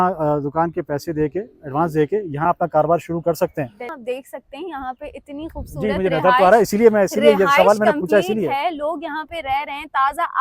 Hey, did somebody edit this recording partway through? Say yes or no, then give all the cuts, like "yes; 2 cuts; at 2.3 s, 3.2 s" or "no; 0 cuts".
yes; 1 cut; at 4.0 s